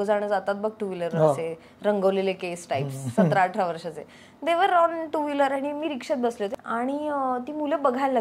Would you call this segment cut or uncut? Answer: cut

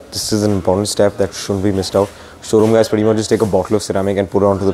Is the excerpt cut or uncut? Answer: uncut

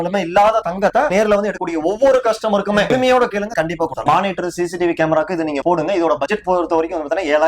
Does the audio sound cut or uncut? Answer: cut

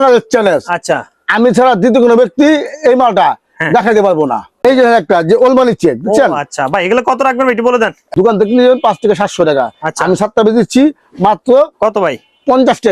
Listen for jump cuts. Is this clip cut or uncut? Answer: cut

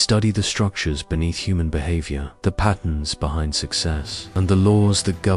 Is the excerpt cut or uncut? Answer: uncut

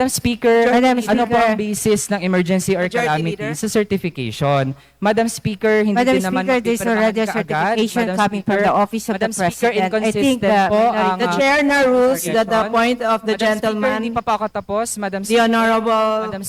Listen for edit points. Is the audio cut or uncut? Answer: uncut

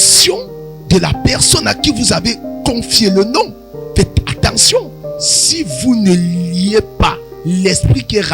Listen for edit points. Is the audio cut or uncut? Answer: cut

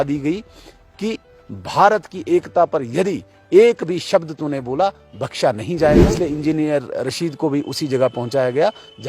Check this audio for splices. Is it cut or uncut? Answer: cut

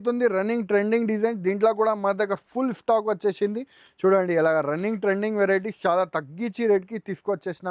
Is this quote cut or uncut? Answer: uncut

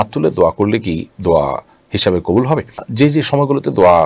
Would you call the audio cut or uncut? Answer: uncut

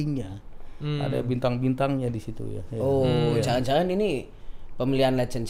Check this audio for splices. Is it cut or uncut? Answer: uncut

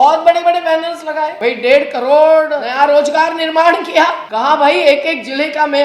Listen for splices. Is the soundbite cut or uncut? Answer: cut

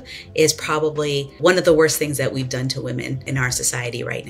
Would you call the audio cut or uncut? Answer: cut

